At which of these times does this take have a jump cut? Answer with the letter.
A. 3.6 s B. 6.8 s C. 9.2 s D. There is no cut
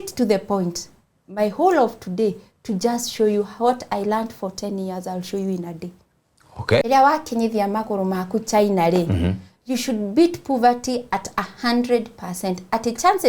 B